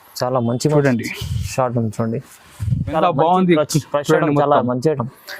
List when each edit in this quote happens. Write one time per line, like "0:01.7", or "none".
0:02.9